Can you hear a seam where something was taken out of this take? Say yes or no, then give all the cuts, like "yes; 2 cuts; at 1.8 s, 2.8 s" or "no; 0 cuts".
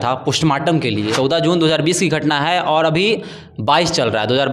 yes; 1 cut; at 1.1 s